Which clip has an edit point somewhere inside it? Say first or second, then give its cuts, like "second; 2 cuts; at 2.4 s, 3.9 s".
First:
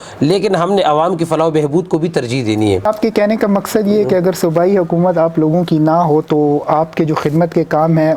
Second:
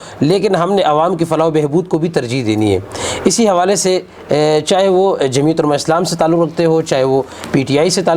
first; 1 cut; at 2.9 s